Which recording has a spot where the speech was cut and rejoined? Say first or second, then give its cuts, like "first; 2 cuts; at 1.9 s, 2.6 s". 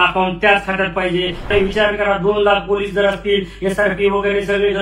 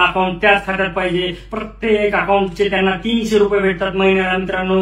first; 1 cut; at 1.5 s